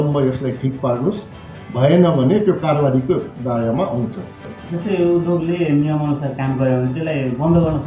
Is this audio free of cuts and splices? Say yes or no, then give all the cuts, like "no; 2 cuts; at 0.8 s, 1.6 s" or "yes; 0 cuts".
no; 1 cut; at 4.3 s